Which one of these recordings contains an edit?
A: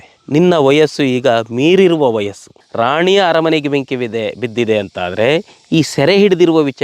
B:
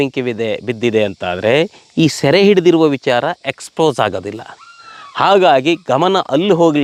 A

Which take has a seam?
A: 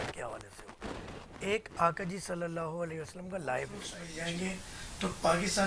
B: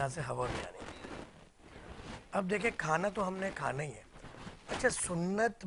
A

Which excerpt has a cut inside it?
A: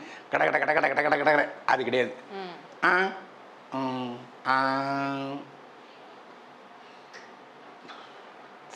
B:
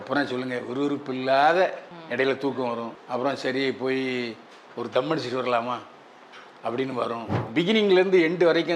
B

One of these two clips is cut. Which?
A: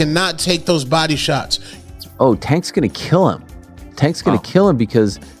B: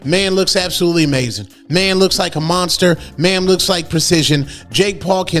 A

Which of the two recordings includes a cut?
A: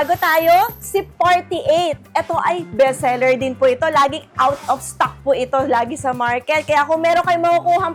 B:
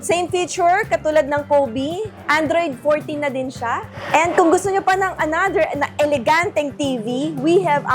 B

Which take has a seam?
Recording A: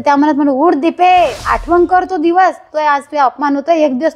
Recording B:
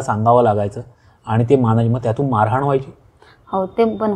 A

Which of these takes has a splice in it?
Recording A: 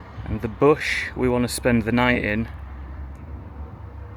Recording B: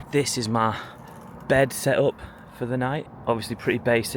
B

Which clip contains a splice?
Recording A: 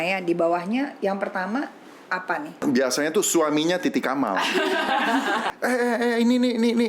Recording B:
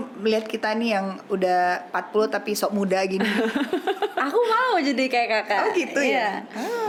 A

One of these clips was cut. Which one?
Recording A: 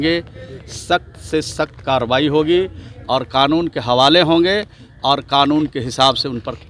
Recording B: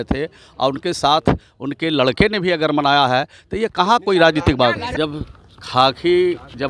B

